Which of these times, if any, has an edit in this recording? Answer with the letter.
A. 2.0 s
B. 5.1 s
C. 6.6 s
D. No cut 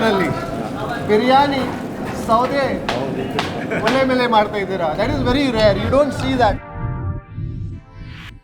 C